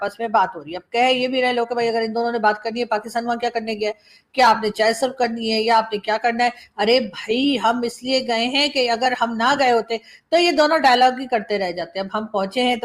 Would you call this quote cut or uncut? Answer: uncut